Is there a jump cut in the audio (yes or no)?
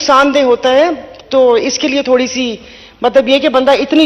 no